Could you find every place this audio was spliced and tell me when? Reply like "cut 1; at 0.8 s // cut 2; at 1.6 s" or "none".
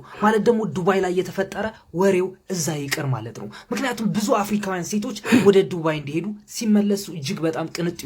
none